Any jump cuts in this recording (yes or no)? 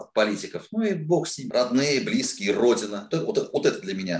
yes